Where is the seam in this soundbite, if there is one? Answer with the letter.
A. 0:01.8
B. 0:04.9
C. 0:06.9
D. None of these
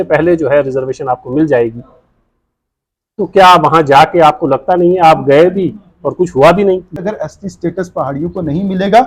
C